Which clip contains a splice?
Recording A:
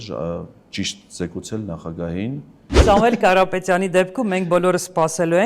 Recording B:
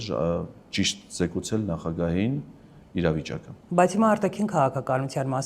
A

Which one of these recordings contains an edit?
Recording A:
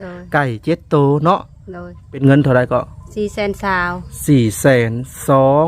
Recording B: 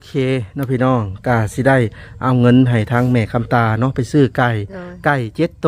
A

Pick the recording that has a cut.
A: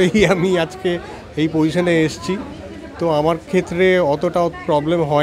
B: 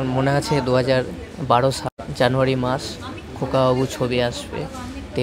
B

